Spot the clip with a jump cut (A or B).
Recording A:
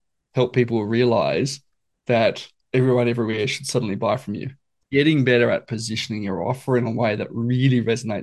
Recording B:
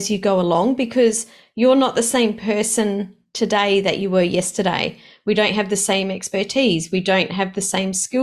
A